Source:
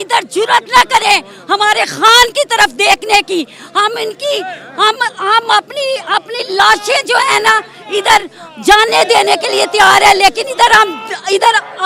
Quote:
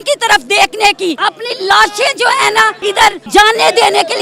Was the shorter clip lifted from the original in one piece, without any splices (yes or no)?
no